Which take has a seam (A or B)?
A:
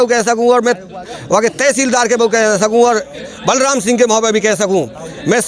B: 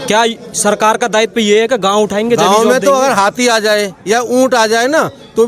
B